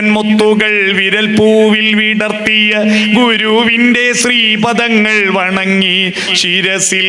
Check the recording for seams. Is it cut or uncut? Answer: uncut